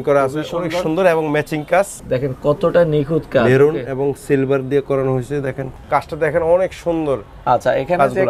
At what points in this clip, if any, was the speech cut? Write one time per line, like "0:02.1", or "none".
0:02.0
0:05.7